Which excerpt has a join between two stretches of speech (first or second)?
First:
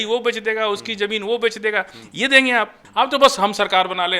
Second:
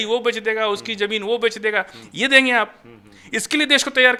first